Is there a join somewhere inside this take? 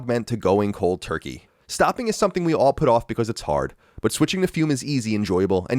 yes; 1 cut; at 1.4 s

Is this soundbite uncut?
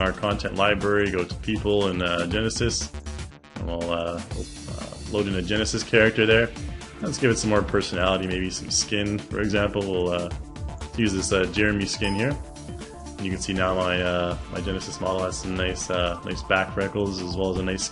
no; 1 cut; at 2.1 s

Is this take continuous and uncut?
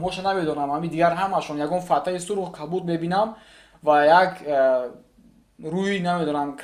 yes; 0 cuts

